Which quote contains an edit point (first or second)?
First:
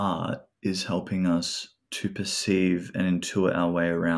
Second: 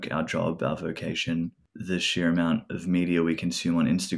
second